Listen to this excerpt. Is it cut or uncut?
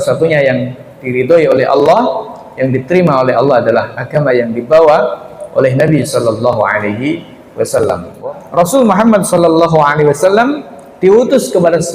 cut